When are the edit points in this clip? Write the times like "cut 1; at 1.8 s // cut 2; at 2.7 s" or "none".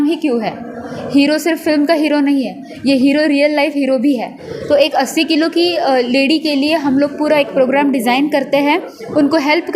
cut 1; at 4.5 s

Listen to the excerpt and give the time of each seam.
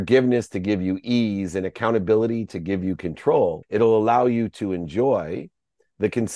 cut 1; at 3.6 s

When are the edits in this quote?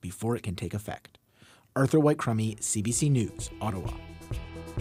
none

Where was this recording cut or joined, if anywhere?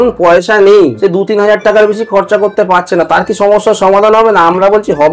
cut 1; at 1.0 s

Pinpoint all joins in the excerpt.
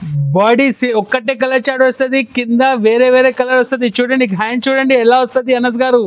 none

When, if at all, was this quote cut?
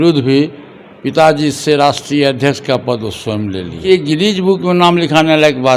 cut 1; at 3.9 s

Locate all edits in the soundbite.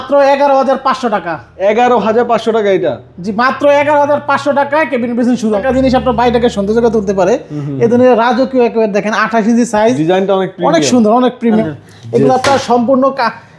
cut 1; at 5.6 s // cut 2; at 11.6 s

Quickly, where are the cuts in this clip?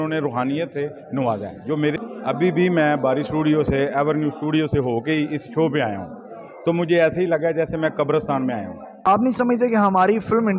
cut 1; at 2.0 s // cut 2; at 8.8 s

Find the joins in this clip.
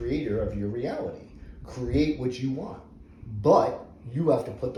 none

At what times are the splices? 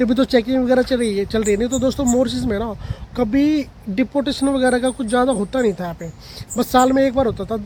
none

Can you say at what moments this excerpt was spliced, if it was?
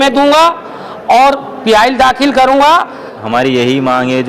cut 1; at 3.2 s

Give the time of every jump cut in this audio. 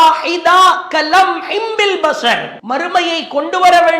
cut 1; at 2.5 s

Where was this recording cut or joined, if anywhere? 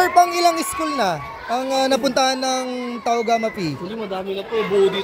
none

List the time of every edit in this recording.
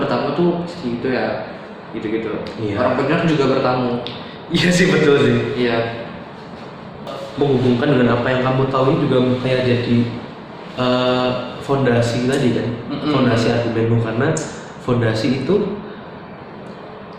cut 1; at 7.2 s

